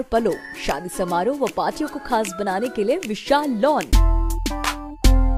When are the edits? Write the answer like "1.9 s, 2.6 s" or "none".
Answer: 3.9 s